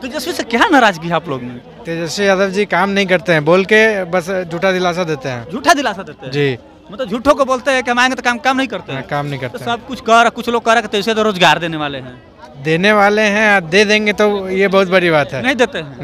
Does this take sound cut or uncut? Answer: uncut